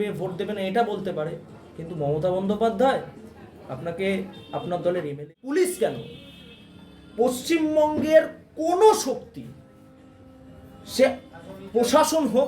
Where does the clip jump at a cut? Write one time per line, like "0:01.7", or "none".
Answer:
0:05.1